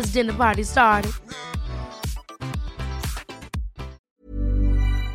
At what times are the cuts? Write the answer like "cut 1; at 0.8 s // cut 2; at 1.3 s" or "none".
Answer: cut 1; at 4.0 s